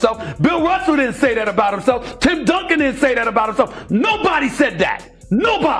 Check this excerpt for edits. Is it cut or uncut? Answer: uncut